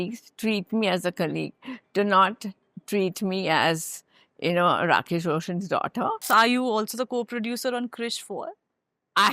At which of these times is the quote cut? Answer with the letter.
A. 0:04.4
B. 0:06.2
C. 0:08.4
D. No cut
B